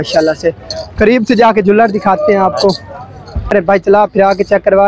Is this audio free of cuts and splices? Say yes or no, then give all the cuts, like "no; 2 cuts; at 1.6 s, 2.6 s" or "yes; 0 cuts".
no; 1 cut; at 3.5 s